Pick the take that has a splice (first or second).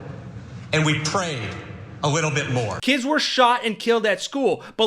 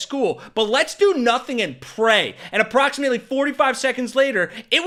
first